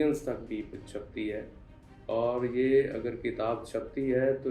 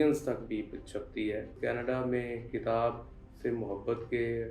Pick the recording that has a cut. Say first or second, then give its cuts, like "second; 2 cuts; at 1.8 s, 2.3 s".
second; 1 cut; at 1.6 s